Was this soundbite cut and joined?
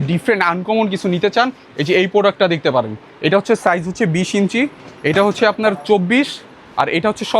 no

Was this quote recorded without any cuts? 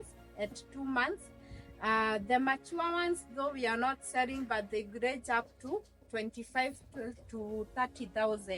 yes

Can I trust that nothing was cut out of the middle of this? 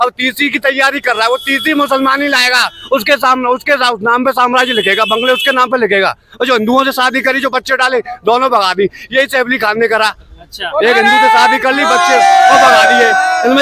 yes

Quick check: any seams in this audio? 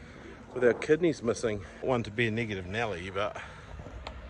yes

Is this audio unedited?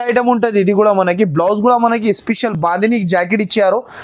yes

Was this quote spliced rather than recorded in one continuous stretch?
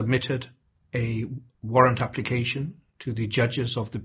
no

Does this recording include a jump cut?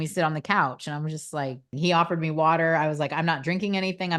yes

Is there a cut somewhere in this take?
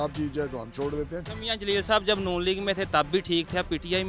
yes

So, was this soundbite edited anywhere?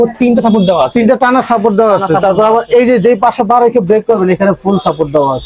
no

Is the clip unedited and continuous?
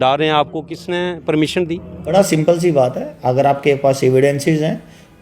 no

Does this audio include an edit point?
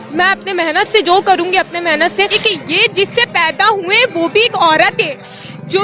yes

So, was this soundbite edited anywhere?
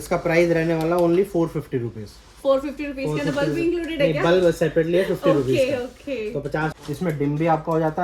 no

